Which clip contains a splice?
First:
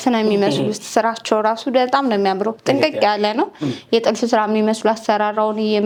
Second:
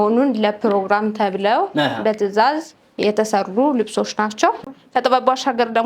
second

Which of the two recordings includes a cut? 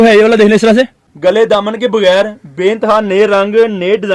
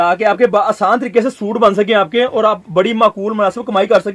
first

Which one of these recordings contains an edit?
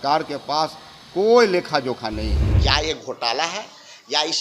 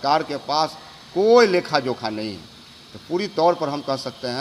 first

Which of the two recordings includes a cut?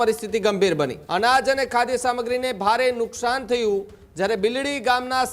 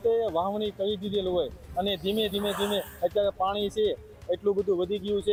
first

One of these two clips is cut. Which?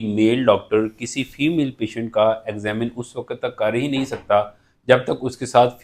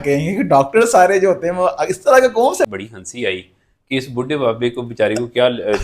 second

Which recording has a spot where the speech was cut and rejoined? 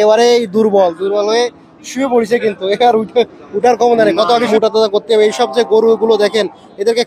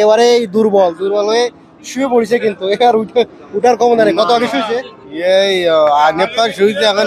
first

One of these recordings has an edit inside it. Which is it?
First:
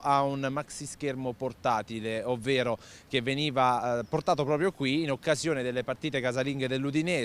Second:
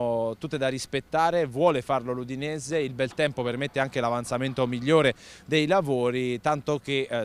first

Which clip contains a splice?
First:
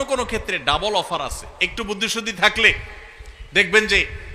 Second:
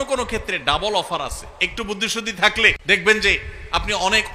second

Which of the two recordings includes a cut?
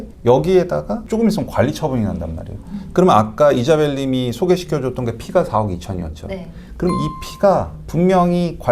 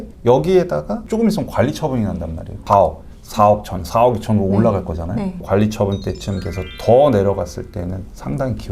second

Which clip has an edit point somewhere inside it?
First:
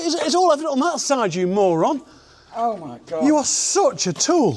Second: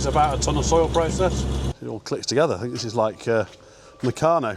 second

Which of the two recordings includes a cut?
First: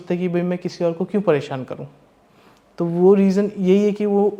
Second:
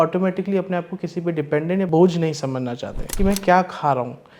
second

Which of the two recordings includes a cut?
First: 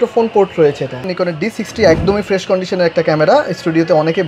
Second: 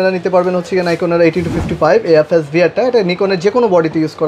first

